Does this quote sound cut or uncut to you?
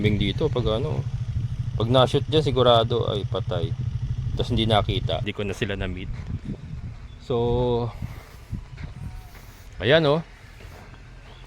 cut